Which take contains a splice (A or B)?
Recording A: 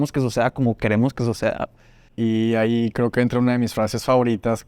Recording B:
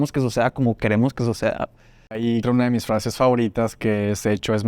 B